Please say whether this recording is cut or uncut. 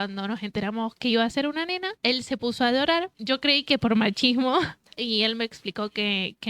cut